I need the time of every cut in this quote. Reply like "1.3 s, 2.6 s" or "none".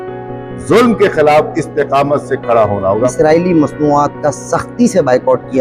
3.1 s